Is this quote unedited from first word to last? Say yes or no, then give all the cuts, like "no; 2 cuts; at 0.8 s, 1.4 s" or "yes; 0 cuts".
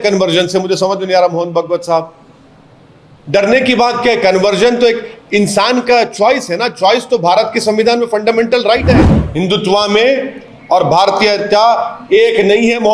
no; 1 cut; at 9.2 s